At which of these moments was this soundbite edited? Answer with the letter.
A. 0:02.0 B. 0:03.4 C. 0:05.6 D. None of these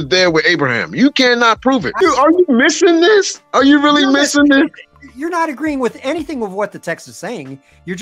A